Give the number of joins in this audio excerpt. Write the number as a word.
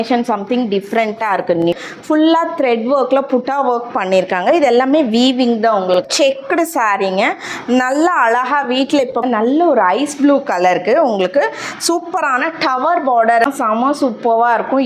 four